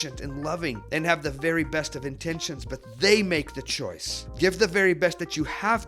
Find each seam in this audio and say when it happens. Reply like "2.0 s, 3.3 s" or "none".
4.2 s